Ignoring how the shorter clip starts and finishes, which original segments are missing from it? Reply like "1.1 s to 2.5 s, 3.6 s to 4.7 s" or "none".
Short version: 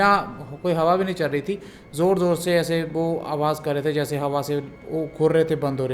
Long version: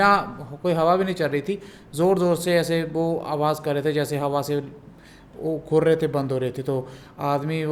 4.8 s to 5.3 s